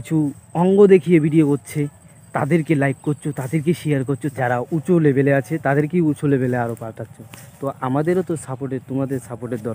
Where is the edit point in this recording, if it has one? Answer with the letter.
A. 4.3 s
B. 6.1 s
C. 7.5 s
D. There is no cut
A